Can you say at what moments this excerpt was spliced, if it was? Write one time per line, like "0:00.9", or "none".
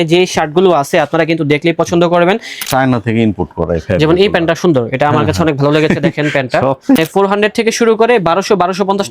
0:02.7
0:07.0